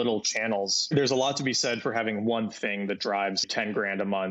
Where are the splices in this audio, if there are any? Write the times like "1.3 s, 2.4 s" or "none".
0.9 s, 3.5 s